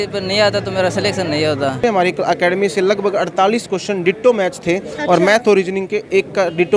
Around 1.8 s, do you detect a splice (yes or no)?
yes